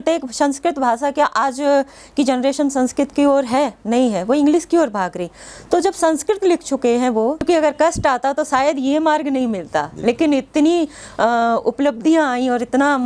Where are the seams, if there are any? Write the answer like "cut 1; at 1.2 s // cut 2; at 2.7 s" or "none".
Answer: cut 1; at 7.4 s